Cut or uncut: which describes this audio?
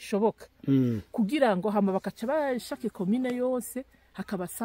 uncut